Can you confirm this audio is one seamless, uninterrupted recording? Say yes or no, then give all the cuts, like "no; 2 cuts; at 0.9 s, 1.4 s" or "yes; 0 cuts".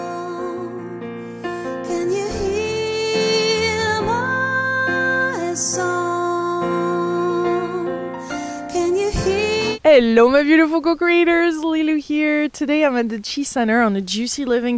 yes; 0 cuts